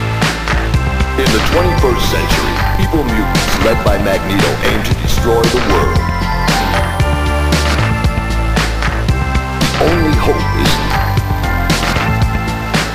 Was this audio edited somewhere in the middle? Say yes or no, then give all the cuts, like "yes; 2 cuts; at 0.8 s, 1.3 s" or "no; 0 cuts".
no; 0 cuts